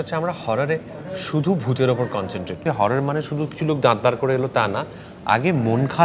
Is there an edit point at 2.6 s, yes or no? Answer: yes